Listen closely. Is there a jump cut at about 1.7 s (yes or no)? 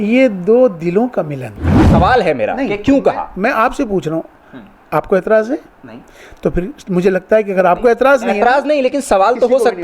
yes